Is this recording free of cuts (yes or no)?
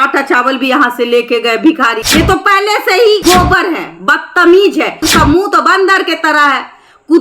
no